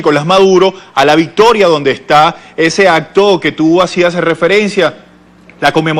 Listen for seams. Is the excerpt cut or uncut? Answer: uncut